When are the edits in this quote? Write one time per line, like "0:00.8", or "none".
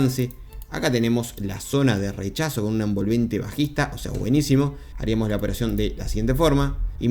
0:04.9